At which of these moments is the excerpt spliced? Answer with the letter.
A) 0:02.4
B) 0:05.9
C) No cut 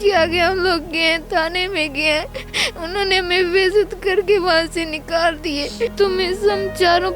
B